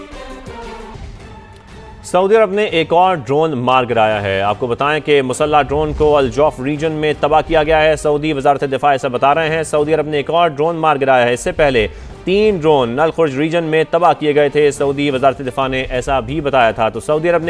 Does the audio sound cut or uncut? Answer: cut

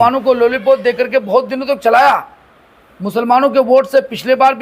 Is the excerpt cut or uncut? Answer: uncut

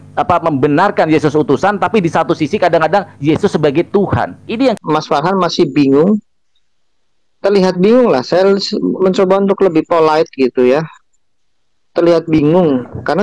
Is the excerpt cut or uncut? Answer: cut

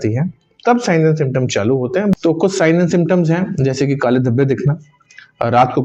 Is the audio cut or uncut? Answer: cut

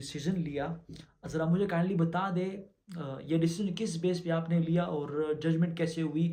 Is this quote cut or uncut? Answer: uncut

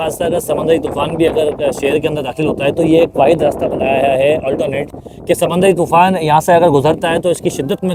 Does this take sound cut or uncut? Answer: uncut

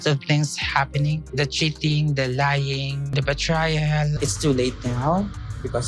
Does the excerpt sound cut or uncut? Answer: uncut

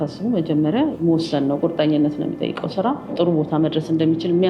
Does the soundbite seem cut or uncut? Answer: cut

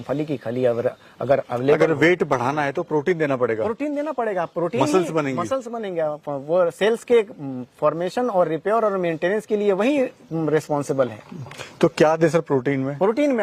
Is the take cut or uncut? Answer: uncut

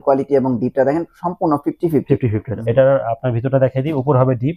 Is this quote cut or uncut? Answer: cut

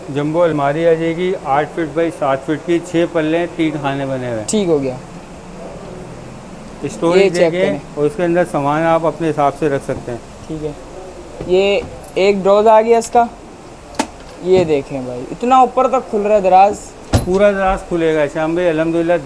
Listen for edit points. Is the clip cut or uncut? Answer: uncut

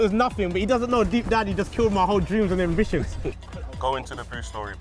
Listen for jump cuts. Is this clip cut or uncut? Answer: uncut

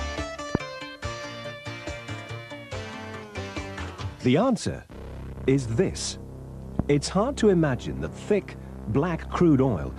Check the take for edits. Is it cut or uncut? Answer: uncut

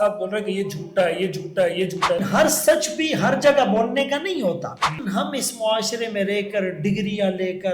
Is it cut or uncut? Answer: cut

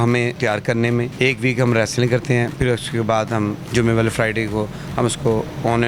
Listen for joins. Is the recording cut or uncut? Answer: uncut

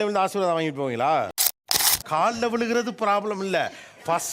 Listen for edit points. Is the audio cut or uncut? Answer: cut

